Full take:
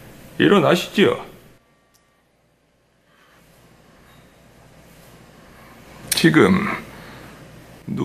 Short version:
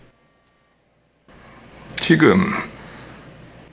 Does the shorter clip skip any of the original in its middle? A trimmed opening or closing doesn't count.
yes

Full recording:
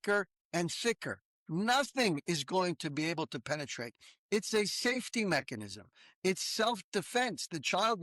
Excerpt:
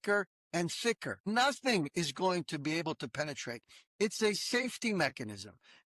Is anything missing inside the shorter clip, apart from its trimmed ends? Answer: yes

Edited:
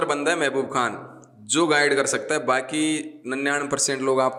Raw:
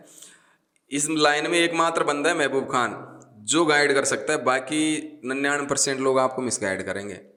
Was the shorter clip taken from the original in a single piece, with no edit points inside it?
yes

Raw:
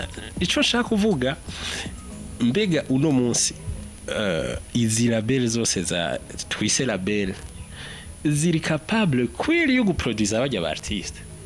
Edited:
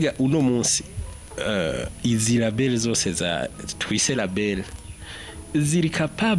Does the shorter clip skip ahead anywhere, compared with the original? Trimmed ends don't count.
no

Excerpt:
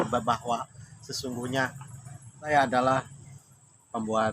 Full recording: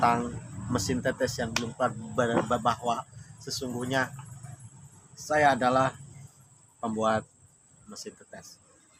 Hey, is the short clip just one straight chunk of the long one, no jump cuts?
no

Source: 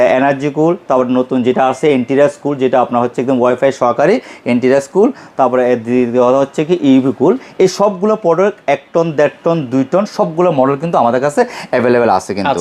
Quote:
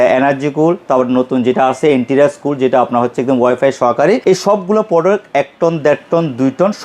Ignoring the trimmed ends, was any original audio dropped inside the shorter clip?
yes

